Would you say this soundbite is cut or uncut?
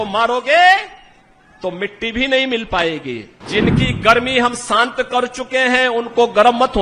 cut